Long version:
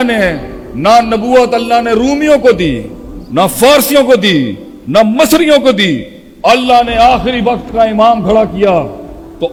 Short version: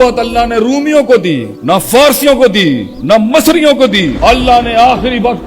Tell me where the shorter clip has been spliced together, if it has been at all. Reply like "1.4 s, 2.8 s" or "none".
1.5 s, 2.9 s, 4.1 s